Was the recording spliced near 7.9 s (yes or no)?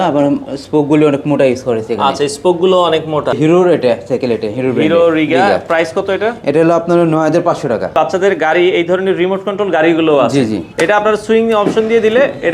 yes